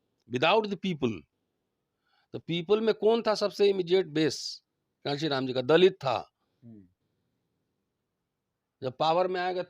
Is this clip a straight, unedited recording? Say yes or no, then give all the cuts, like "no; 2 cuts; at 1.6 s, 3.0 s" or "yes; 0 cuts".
yes; 0 cuts